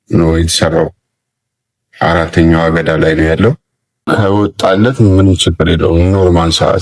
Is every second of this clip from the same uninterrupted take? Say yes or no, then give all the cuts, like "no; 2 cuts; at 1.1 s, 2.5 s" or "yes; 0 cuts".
no; 1 cut; at 4.1 s